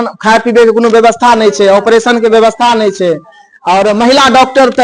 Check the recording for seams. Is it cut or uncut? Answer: uncut